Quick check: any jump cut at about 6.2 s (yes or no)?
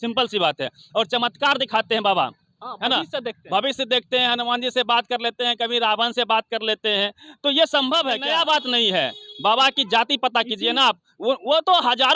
no